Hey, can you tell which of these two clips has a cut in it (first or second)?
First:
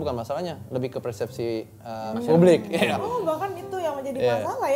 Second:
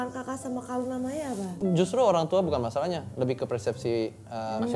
second